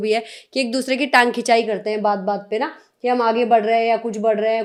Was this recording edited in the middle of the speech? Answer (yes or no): no